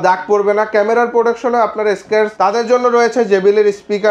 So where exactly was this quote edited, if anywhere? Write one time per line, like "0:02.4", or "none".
0:02.3